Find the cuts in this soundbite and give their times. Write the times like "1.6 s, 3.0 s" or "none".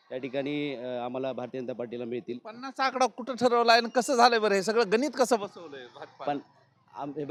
none